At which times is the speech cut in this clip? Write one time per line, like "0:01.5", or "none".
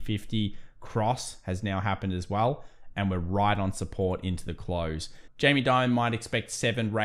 0:05.2